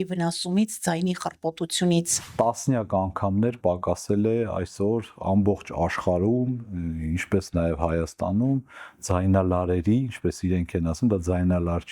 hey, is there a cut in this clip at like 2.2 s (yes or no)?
yes